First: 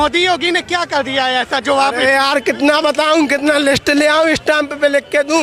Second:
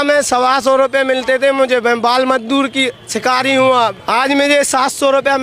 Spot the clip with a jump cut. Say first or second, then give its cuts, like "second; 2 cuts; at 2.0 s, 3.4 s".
second; 1 cut; at 4.0 s